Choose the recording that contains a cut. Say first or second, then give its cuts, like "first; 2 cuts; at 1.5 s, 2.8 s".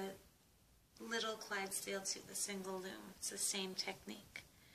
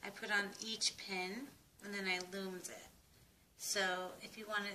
first; 1 cut; at 1.0 s